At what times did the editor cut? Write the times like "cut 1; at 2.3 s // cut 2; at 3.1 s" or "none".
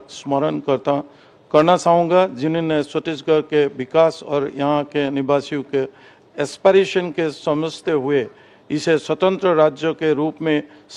none